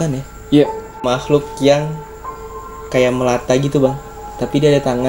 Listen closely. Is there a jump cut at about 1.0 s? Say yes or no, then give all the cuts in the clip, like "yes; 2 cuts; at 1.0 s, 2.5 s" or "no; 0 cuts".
yes; 1 cut; at 1.0 s